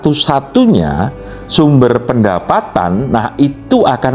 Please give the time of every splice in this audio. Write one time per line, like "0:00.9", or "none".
none